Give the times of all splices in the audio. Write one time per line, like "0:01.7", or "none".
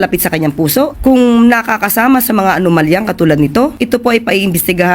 0:00.9
0:03.7